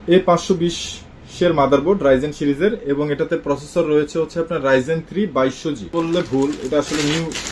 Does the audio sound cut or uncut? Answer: cut